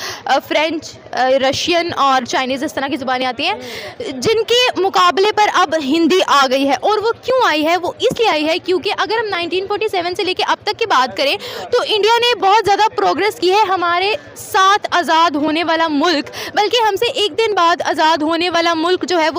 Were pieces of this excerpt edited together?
no; 0 cuts

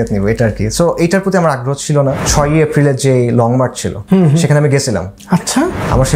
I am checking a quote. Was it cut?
yes; 3 cuts; at 2.2 s, 3.9 s, 5.1 s

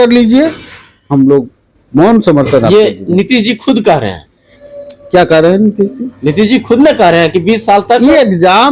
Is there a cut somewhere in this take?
no; 0 cuts

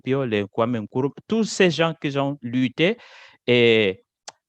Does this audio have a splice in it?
no; 0 cuts

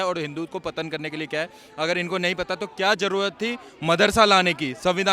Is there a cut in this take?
no; 0 cuts

